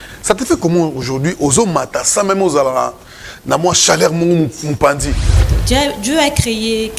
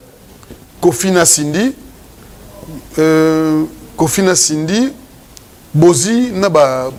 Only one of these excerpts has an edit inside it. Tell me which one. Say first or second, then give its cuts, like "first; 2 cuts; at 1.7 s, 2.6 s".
first; 1 cut; at 5.3 s